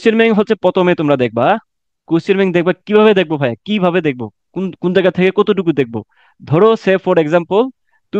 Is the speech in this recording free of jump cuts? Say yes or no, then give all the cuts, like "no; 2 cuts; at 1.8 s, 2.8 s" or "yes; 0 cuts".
yes; 0 cuts